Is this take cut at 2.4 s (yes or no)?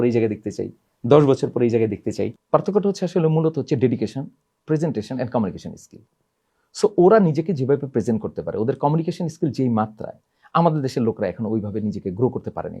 yes